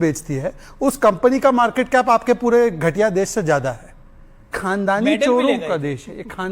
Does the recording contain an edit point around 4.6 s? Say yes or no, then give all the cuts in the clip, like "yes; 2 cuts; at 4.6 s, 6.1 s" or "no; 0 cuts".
yes; 1 cut; at 4.6 s